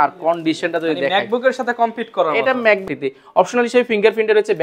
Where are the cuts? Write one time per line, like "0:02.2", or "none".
0:02.9